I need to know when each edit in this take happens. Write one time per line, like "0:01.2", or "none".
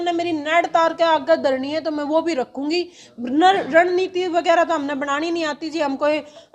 none